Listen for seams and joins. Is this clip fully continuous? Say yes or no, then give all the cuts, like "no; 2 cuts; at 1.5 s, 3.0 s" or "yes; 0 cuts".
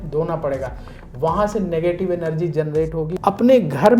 no; 1 cut; at 3.0 s